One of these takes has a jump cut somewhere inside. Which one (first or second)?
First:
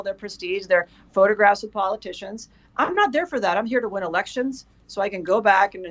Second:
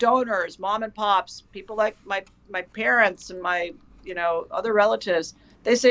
second